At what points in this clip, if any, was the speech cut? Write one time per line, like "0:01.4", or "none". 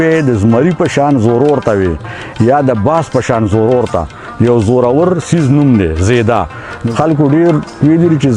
0:06.8